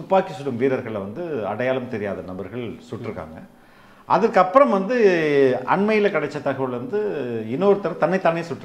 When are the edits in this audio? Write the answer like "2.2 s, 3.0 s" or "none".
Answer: none

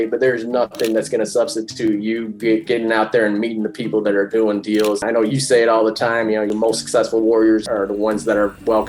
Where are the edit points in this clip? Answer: 5.0 s, 6.5 s, 7.6 s

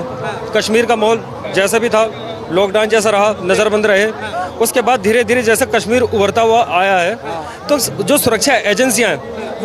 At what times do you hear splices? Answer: none

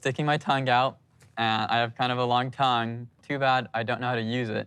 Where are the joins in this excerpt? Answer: 3.1 s

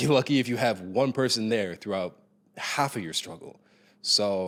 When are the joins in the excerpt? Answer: none

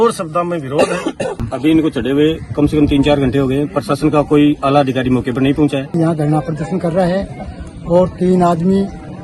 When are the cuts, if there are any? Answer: 1.4 s, 5.9 s

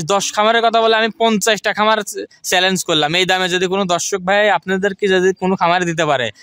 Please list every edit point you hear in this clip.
none

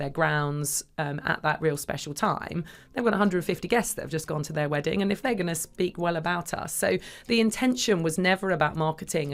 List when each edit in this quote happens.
none

